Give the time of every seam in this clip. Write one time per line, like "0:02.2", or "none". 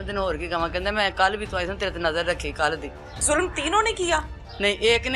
0:03.2